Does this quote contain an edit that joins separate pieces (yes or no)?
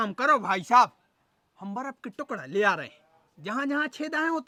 no